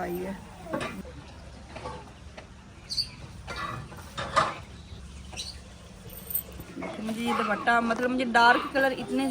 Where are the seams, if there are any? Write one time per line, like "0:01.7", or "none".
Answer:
0:01.0
0:04.9
0:06.7